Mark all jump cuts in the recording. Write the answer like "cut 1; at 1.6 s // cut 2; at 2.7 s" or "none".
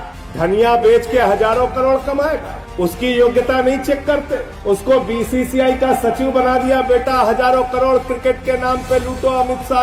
none